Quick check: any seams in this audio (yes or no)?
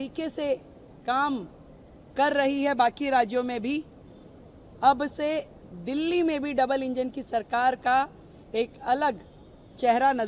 no